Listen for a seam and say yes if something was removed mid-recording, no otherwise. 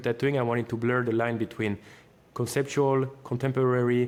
no